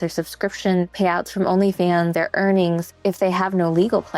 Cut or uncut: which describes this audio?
cut